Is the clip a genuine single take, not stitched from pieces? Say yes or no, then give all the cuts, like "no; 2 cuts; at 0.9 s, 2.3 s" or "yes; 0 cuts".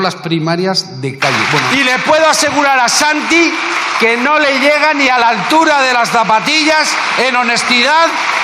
no; 1 cut; at 1.7 s